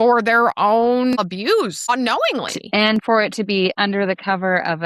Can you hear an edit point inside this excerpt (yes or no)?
yes